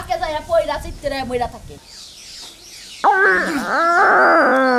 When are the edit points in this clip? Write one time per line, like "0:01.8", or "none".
0:01.7